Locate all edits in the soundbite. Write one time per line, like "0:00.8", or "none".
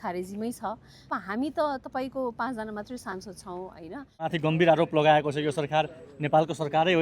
0:01.1
0:04.3